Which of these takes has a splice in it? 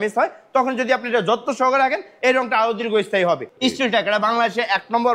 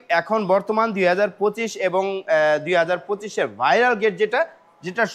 first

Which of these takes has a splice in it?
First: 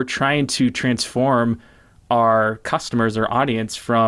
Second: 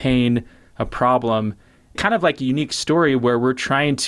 second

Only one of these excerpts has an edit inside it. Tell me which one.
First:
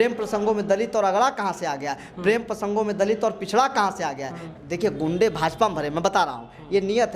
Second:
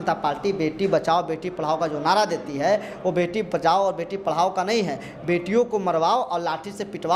first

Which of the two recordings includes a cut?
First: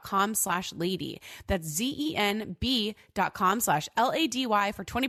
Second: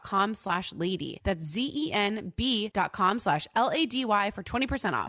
second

